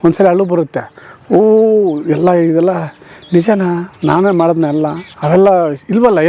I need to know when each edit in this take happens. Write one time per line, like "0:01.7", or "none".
0:05.1